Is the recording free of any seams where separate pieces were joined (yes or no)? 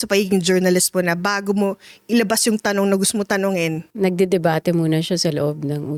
yes